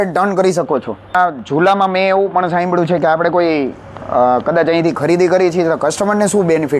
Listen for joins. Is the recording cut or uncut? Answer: cut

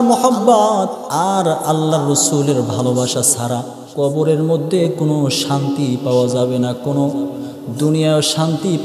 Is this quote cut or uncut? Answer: cut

